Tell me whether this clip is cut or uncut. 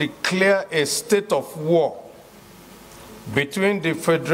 cut